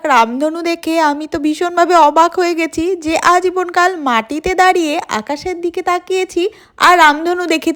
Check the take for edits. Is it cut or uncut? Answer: uncut